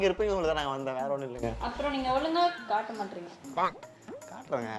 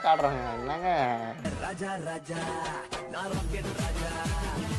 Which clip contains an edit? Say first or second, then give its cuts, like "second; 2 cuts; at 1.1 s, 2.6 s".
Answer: second; 1 cut; at 1.3 s